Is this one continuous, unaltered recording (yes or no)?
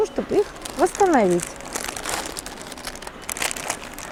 yes